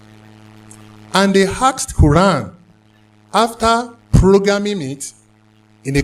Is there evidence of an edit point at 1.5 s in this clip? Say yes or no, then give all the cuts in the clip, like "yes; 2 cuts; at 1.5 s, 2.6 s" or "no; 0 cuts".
no; 1 cut; at 2.8 s